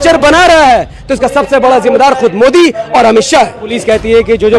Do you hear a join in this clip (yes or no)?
yes